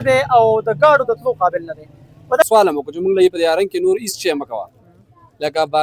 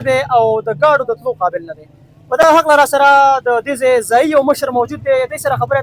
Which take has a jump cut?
first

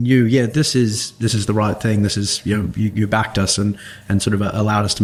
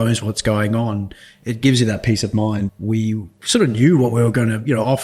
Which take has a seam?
second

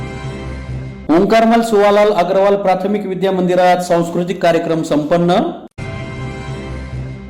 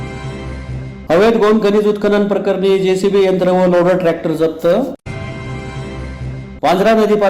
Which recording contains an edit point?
second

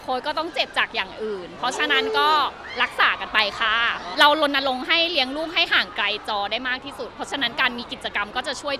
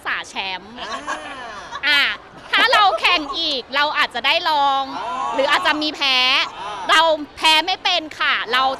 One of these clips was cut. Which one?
first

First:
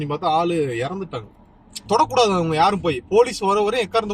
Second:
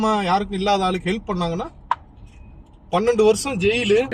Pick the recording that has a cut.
first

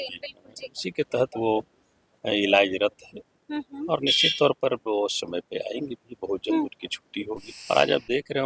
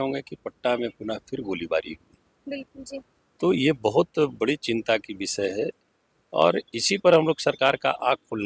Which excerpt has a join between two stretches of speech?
first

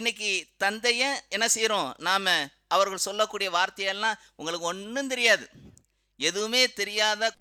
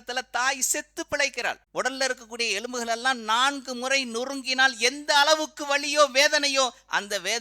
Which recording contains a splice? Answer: second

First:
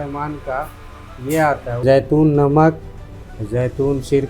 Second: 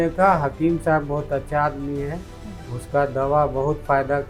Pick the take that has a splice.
first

